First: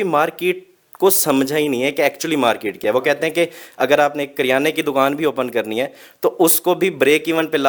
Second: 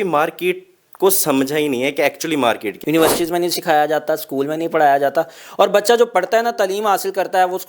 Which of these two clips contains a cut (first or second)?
second